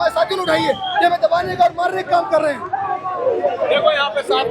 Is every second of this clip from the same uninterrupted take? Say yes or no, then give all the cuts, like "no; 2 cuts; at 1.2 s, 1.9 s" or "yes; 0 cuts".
yes; 0 cuts